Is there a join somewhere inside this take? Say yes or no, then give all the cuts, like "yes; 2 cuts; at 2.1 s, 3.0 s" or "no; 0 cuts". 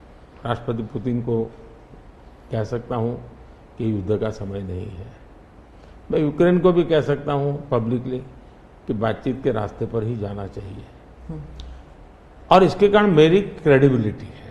no; 0 cuts